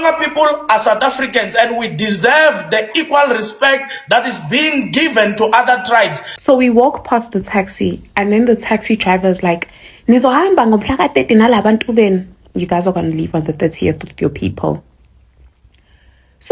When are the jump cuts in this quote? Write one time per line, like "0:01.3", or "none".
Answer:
0:06.3